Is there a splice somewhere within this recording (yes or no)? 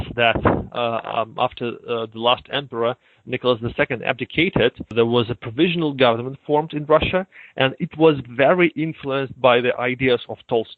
no